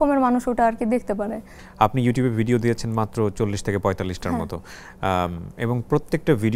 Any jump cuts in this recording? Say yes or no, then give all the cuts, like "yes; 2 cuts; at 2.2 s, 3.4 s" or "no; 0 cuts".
yes; 1 cut; at 1.6 s